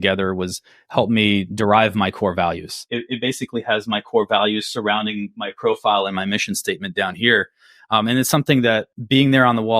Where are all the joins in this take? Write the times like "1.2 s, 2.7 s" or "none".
2.7 s, 8.9 s